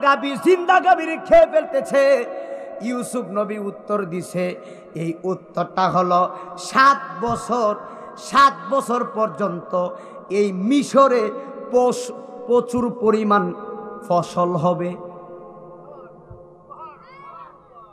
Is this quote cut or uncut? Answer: uncut